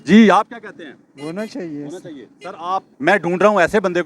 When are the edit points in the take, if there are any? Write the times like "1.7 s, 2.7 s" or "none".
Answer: 2.9 s